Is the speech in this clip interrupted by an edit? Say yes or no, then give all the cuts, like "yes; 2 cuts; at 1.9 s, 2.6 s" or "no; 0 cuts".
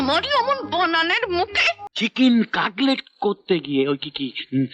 yes; 1 cut; at 1.9 s